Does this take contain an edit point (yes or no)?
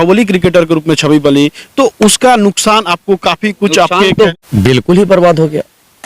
yes